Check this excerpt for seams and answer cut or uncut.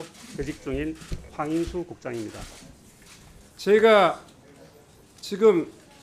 uncut